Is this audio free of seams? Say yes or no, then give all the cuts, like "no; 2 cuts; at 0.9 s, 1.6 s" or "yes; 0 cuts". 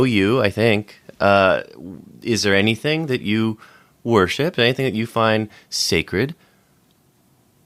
yes; 0 cuts